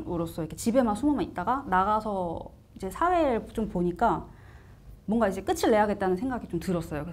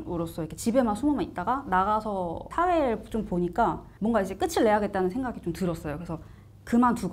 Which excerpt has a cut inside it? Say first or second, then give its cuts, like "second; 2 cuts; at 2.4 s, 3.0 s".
second; 2 cuts; at 2.4 s, 3.9 s